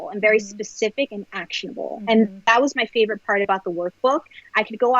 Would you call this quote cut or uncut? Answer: uncut